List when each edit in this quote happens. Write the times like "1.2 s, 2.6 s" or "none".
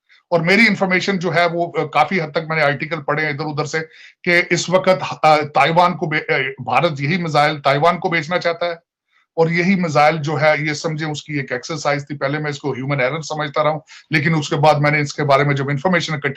none